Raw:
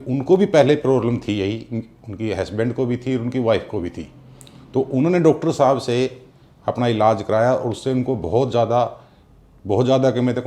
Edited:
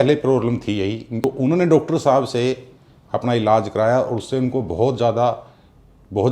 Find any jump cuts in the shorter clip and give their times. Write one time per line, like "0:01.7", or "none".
0:01.1